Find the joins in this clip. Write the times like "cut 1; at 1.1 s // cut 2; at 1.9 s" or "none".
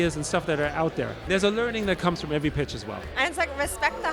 cut 1; at 1.2 s